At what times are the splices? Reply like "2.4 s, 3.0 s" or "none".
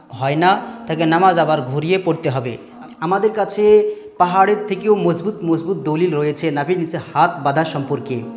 2.7 s